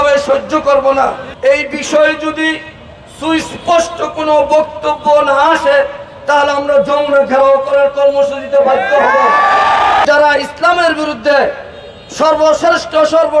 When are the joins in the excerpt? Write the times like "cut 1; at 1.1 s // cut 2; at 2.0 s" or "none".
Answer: cut 1; at 1.2 s // cut 2; at 10.0 s